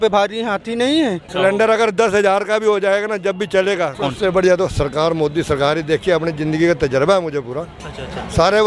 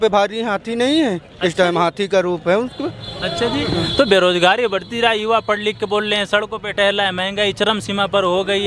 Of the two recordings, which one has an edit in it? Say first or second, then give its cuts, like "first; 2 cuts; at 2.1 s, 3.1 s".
first; 2 cuts; at 1.3 s, 4.0 s